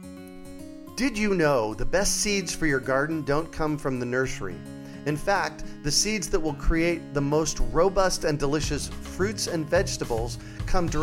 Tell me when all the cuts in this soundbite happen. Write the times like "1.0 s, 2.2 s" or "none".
1.0 s